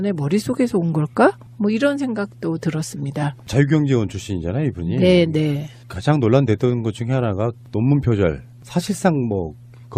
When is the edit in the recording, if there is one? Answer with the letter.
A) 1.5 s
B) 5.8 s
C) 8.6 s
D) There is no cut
B